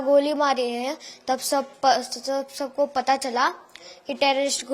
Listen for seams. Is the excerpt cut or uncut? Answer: uncut